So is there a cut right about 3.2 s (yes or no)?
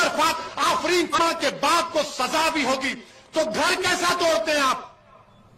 no